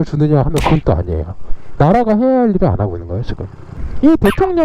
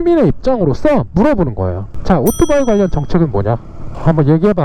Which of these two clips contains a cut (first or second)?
first